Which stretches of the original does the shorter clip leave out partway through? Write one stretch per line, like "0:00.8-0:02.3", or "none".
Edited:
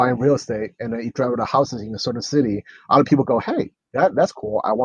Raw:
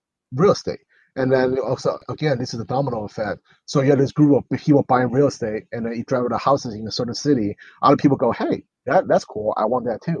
none